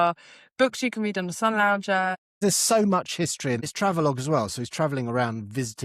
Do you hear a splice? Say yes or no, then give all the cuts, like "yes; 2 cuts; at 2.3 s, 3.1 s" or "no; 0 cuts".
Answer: yes; 2 cuts; at 2.3 s, 3.7 s